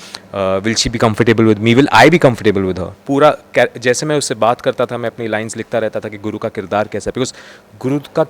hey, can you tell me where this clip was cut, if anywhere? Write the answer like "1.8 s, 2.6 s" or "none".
2.9 s